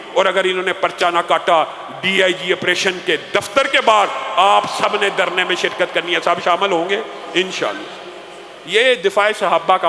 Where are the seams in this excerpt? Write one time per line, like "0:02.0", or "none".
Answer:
none